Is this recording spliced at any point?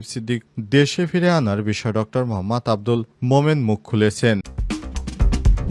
yes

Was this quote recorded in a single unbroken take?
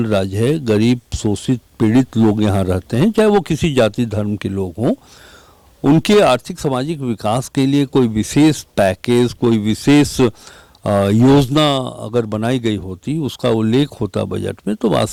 yes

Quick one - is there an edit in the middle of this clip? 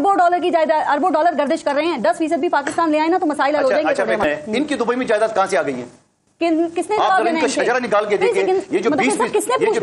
yes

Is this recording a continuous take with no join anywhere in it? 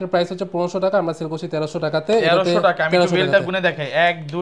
yes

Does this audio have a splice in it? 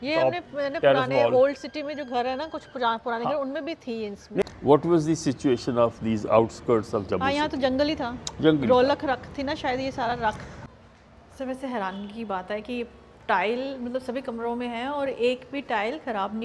yes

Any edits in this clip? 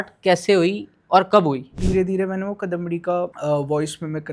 yes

